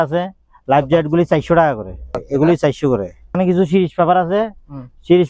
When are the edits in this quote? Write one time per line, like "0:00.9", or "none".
0:02.2
0:03.4